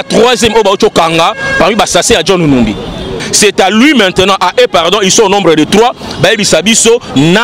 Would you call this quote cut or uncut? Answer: cut